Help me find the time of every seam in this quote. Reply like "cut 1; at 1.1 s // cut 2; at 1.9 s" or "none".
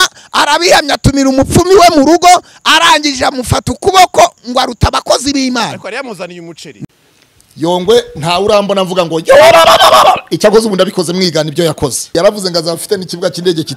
cut 1; at 6.8 s

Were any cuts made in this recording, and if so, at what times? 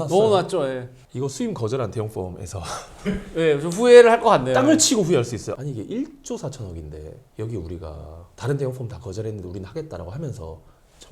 cut 1; at 0.9 s // cut 2; at 5.5 s

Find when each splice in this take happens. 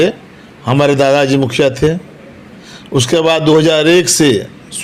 none

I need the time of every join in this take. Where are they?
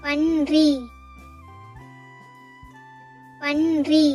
none

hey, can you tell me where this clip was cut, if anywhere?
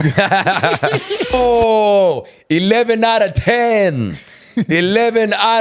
cut 1; at 1.3 s

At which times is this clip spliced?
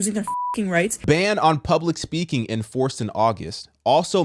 cut 1; at 1.0 s

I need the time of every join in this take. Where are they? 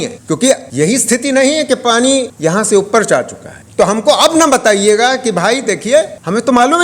cut 1; at 3.5 s

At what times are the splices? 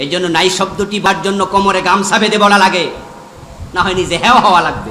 cut 1; at 1.0 s

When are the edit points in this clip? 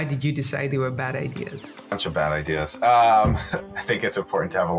cut 1; at 1.9 s

